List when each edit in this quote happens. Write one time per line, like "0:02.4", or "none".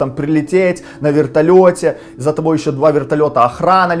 none